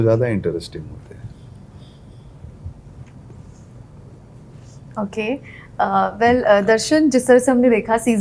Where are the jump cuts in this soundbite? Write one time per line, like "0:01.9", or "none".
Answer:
none